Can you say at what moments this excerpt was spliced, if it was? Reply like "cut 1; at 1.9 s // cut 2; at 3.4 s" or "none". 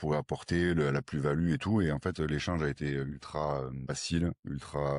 cut 1; at 3.9 s